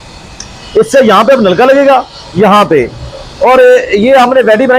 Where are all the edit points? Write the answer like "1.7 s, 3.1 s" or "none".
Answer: none